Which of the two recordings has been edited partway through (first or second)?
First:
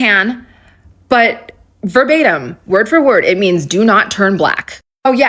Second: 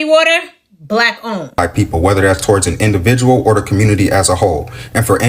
second